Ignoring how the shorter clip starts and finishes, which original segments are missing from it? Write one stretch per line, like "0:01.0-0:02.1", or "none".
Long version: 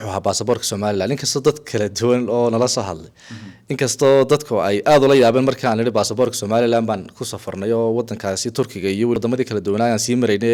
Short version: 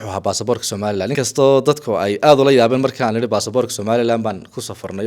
0:01.1-0:03.8